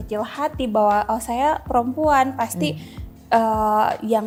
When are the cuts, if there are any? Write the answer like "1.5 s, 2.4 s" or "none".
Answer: none